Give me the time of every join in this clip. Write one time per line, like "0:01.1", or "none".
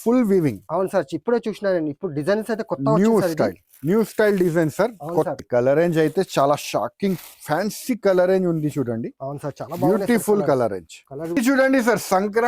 0:05.3
0:11.4